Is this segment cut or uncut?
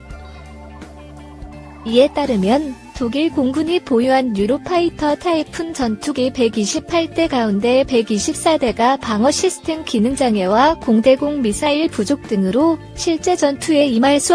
cut